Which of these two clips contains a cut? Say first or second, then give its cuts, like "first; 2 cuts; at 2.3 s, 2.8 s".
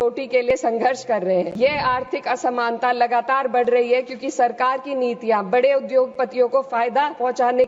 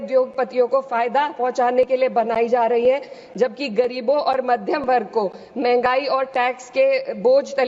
first; 1 cut; at 1.5 s